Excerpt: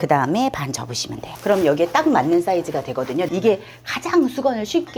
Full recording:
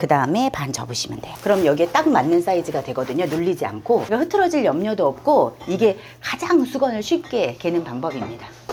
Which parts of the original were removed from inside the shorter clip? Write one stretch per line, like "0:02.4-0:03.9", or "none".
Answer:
0:03.3-0:05.6